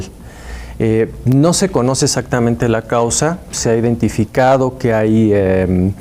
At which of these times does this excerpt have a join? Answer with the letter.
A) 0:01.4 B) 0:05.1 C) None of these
A